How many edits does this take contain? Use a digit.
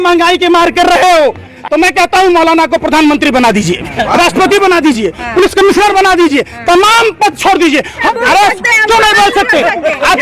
2